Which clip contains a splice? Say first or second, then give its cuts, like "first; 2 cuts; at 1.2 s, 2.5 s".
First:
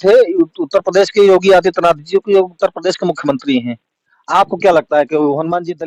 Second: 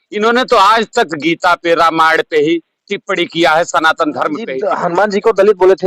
second; 1 cut; at 4.6 s